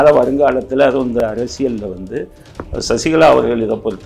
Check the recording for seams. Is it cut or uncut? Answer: cut